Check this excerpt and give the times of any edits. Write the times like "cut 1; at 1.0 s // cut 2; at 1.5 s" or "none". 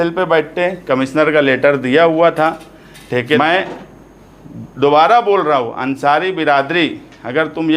cut 1; at 3.4 s